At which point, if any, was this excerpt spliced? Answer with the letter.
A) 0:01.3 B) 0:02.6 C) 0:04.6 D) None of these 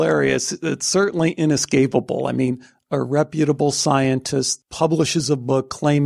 C